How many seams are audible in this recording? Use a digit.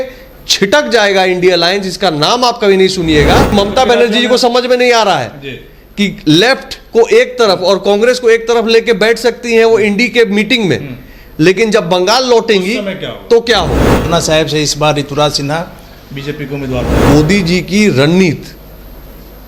3